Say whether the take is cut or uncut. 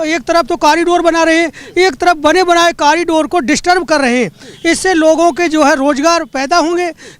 uncut